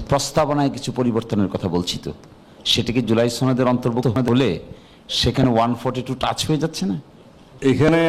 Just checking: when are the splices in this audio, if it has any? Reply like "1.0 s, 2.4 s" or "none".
none

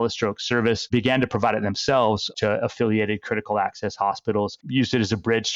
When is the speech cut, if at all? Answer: 4.6 s

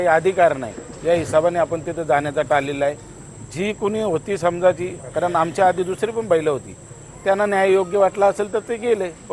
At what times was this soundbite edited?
none

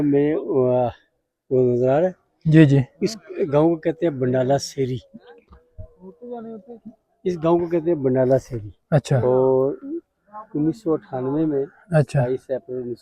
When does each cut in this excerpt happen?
none

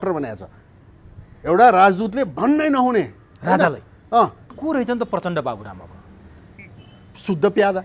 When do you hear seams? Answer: 4.5 s

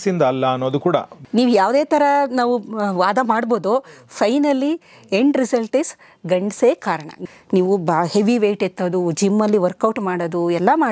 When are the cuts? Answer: 1.2 s, 7.2 s

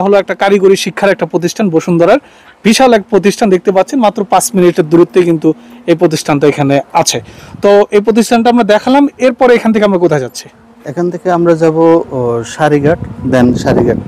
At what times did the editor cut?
none

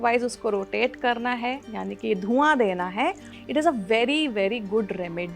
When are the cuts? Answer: 3.3 s

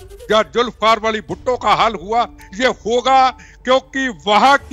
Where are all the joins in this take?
none

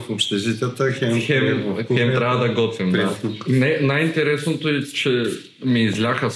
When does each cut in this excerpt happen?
3.1 s

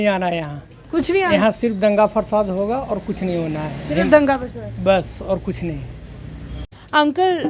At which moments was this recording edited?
none

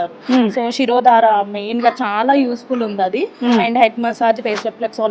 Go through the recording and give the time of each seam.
none

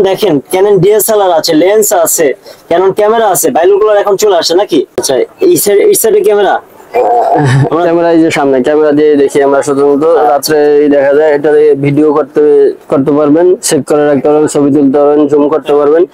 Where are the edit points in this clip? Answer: 5.0 s

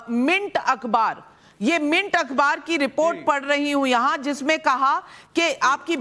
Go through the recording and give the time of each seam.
4.4 s

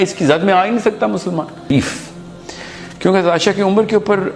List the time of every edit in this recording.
1.7 s

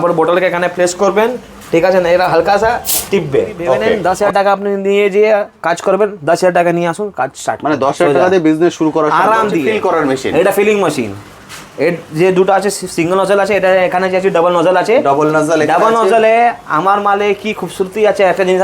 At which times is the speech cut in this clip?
4.0 s, 9.7 s

